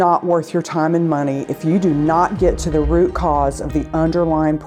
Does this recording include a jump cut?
no; 0 cuts

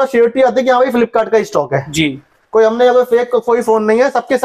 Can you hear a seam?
no; 0 cuts

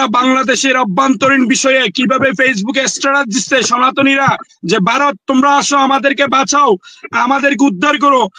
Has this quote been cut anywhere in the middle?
no; 0 cuts

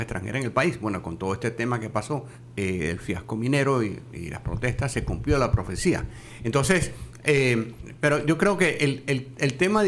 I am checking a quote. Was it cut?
yes; 2 cuts; at 2.4 s, 7.8 s

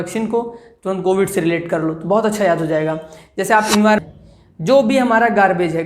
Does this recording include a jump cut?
yes; 1 cut; at 4.0 s

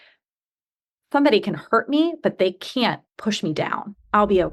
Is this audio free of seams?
no; 1 cut; at 3.0 s

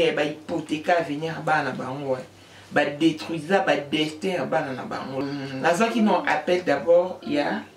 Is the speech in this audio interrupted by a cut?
yes; 1 cut; at 5.2 s

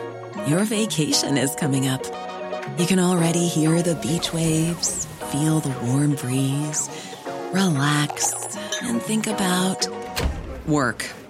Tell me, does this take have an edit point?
no; 0 cuts

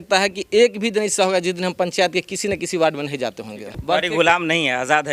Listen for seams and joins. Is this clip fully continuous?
no; 1 cut; at 3.7 s

